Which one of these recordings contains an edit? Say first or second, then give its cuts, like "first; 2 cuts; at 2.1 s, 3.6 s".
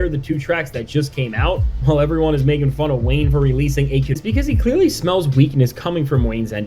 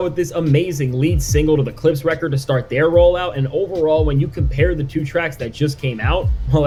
first; 1 cut; at 4.2 s